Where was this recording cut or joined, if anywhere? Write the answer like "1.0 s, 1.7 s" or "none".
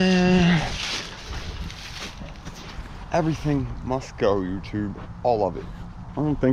none